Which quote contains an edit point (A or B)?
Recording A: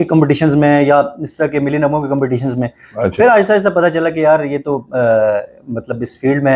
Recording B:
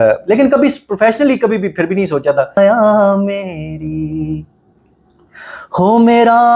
B